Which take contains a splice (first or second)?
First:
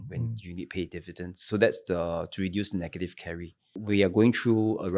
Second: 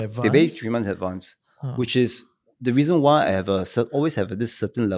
first